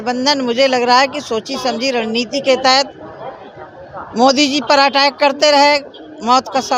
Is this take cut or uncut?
uncut